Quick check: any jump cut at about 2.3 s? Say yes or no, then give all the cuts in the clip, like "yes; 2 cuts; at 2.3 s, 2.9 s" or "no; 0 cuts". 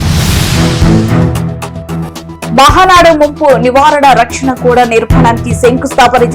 yes; 1 cut; at 2.3 s